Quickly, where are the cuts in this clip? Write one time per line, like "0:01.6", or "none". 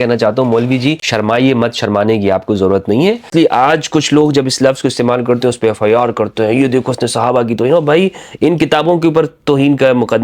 0:01.0
0:03.3